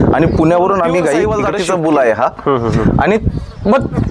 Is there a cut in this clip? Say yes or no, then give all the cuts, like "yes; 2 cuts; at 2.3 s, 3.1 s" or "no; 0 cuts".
yes; 1 cut; at 1.3 s